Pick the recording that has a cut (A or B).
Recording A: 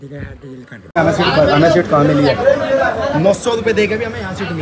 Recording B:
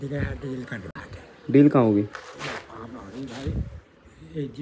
A